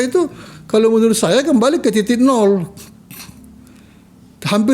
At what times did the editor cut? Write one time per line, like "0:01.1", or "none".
none